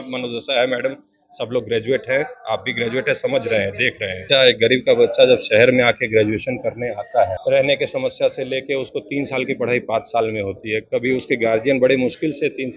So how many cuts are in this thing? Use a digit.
2